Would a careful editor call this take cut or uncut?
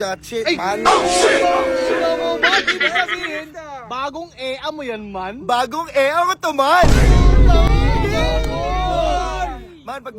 uncut